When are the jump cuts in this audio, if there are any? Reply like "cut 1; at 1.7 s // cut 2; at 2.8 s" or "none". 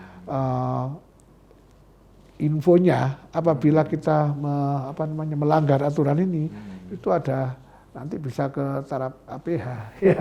none